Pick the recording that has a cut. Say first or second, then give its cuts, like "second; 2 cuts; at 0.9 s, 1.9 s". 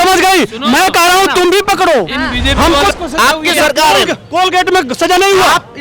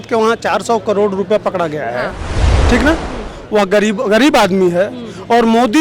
first; 1 cut; at 2.9 s